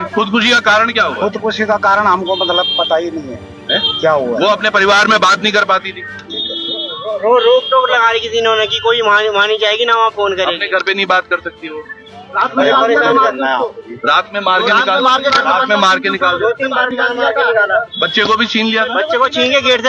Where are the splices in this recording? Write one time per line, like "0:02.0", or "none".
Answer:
none